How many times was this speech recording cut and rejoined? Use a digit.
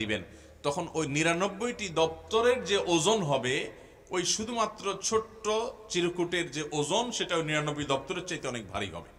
0